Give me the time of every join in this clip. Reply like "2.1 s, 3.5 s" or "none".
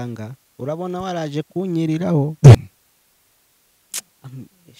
2.6 s